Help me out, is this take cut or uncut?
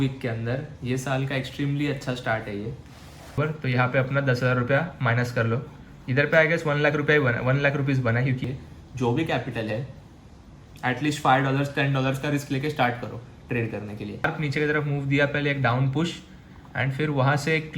cut